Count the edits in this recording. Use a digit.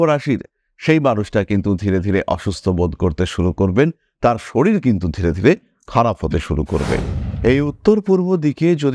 1